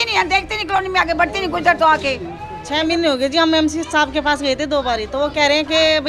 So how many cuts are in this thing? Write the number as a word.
one